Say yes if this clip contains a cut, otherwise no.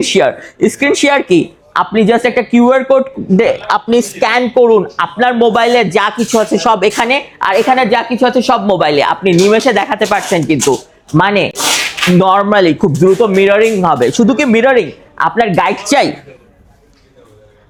no